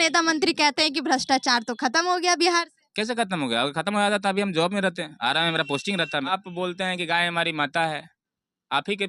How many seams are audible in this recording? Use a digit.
1